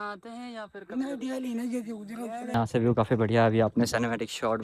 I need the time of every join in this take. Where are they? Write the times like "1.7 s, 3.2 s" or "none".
2.5 s